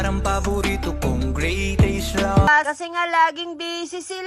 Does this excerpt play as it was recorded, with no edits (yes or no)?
no